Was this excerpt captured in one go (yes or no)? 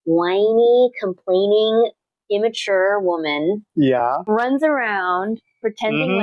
no